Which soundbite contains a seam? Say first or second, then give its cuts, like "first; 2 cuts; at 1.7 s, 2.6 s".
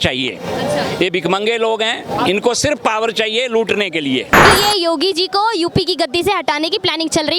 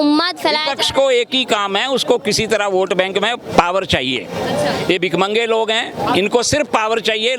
first; 1 cut; at 4.5 s